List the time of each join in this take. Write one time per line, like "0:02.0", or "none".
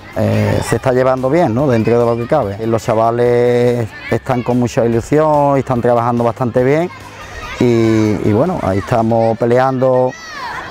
0:02.6